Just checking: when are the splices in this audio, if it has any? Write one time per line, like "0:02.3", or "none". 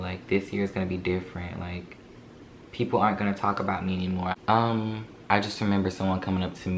0:04.3

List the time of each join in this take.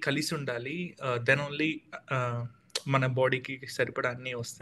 none

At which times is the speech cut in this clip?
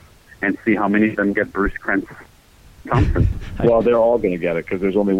0:03.3

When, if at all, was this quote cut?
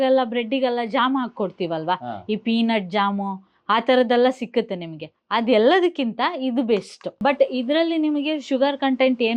0:07.2

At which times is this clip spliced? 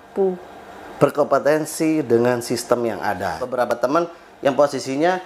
0:03.7

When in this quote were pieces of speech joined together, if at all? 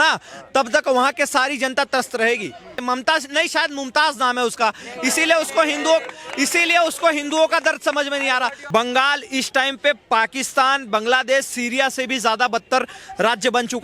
0:02.8
0:08.6

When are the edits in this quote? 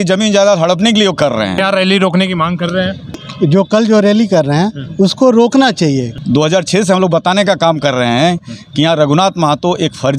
0:01.6
0:03.3
0:06.1

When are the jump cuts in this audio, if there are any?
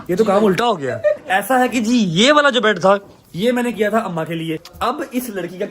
0:01.2
0:04.7

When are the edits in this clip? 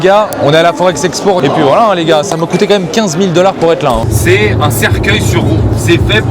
0:01.4
0:04.0

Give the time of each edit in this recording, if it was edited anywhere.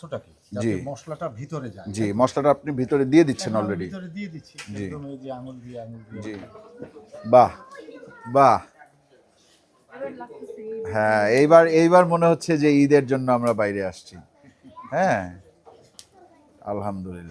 0:06.6

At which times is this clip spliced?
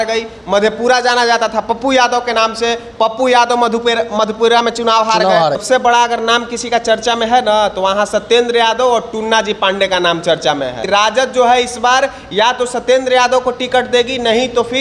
0:05.6
0:10.8

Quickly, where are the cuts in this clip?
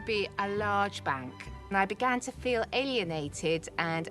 0:01.5

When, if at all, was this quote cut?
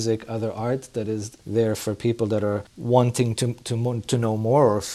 0:01.4
0:02.7

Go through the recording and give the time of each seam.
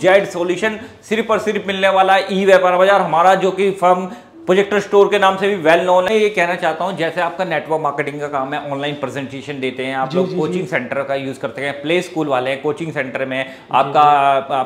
0:06.1

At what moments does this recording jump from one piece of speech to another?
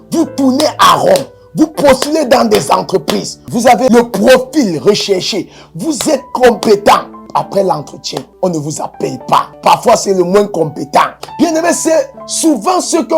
0:07.2
0:08.3
0:09.5
0:11.2

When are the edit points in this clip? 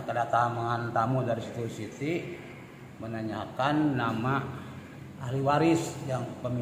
none

